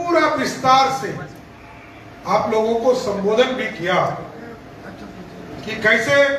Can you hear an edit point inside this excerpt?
no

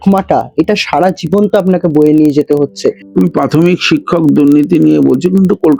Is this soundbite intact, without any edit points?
no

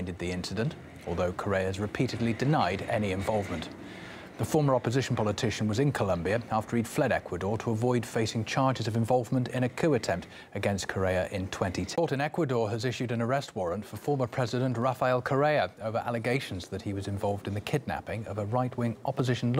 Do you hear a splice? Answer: no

